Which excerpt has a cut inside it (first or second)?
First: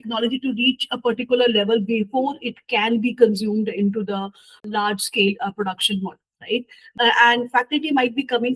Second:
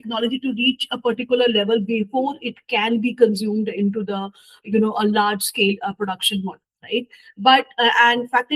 first